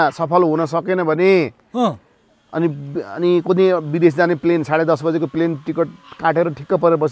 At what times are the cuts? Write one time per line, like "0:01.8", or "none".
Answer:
none